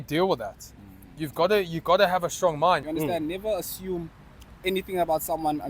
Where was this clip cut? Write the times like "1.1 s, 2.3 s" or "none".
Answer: 2.8 s